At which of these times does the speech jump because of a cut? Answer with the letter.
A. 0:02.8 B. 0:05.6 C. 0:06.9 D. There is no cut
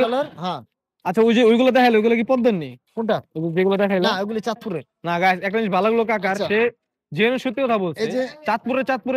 D